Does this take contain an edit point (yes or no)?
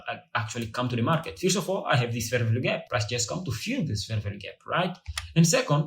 yes